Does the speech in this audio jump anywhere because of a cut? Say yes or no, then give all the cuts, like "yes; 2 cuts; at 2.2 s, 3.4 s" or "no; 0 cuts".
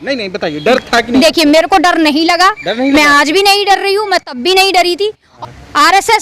yes; 1 cut; at 5.2 s